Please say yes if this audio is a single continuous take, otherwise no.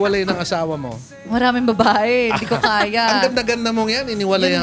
yes